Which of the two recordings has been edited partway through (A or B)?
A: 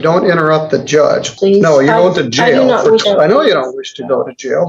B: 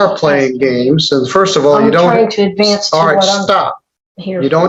A